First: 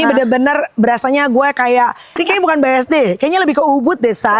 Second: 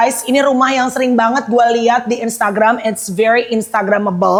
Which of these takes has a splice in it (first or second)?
first